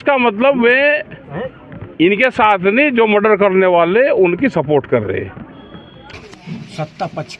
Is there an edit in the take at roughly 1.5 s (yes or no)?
no